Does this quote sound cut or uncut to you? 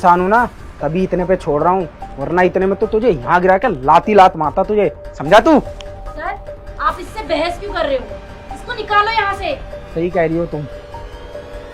uncut